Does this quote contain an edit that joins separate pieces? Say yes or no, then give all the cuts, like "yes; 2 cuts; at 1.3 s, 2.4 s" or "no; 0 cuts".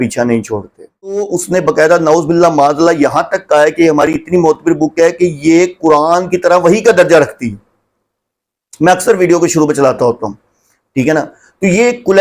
yes; 1 cut; at 1.2 s